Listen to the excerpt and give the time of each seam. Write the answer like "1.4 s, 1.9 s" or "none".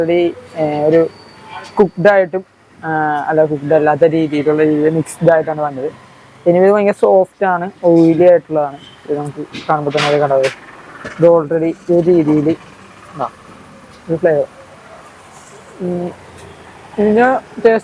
none